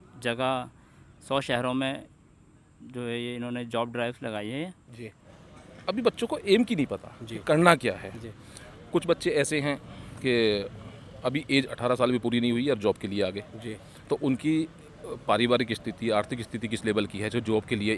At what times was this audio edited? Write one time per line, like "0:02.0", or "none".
0:05.3